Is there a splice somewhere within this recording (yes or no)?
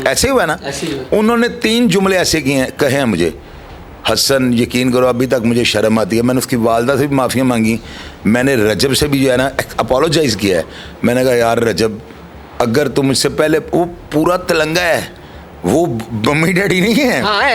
no